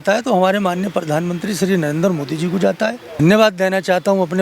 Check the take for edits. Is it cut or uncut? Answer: cut